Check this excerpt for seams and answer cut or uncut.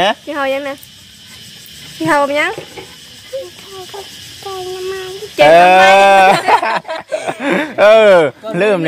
uncut